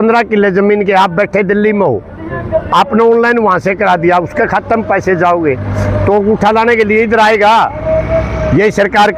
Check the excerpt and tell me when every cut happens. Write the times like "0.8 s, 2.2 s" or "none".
none